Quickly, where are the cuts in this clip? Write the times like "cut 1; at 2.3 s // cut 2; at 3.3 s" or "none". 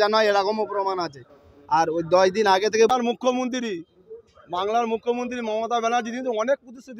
cut 1; at 2.9 s